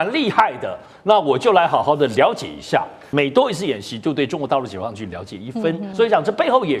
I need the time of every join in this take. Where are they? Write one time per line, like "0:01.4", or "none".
0:03.0
0:05.9